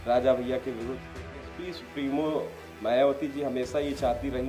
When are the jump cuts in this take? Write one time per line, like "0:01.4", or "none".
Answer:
0:01.5